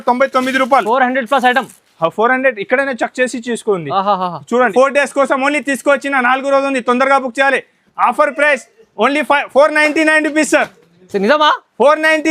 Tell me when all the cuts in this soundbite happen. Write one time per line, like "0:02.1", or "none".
0:04.7